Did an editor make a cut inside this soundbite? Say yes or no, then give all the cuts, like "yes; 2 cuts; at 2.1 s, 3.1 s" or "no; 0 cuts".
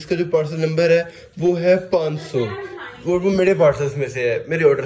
no; 0 cuts